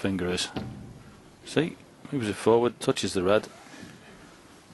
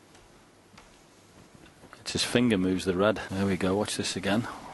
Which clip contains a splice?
second; 1 cut; at 3.3 s

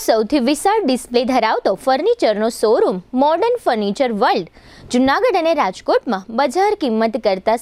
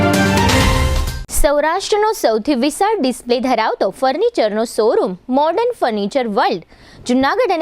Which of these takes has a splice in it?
second; 1 cut; at 1.1 s

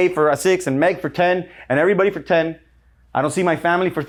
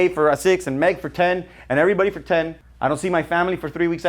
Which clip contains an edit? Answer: second; 1 cut; at 2.6 s

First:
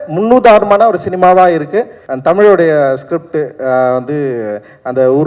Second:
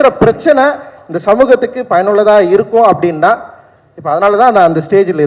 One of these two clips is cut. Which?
first; 1 cut; at 2.0 s

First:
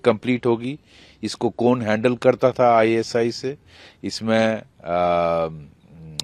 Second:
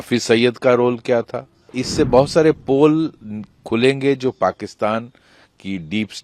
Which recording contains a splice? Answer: second; 1 cut; at 1.8 s

